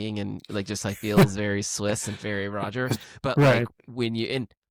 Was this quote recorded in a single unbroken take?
yes; 0 cuts

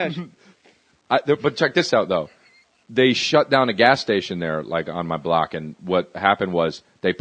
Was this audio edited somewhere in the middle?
yes; 1 cut; at 5.0 s

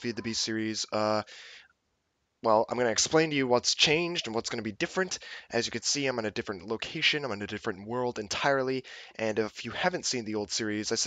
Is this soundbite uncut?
no; 1 cut; at 4.2 s

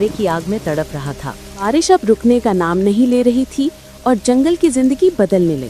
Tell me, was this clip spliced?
yes; 1 cut; at 1.6 s

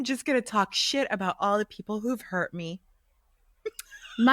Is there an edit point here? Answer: no; 0 cuts

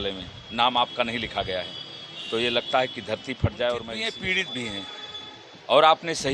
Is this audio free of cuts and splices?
no; 1 cut; at 4.0 s

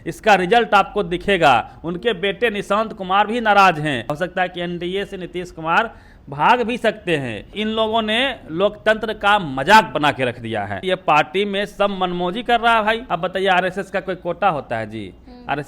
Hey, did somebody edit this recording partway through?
yes; 4 cuts; at 4.2 s, 7.5 s, 10.8 s, 13.1 s

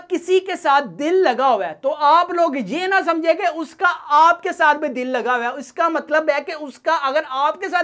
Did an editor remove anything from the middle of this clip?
no; 0 cuts

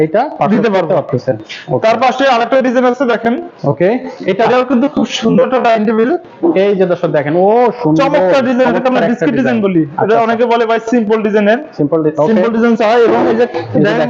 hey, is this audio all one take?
yes; 0 cuts

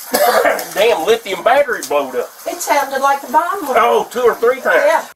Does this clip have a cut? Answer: yes; 1 cut; at 2.4 s

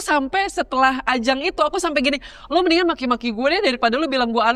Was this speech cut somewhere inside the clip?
no; 0 cuts

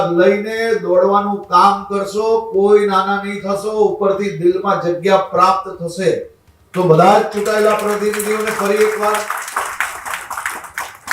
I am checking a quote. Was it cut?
no; 0 cuts

